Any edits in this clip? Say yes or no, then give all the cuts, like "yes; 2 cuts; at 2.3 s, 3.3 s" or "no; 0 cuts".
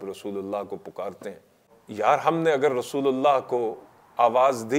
yes; 1 cut; at 1.8 s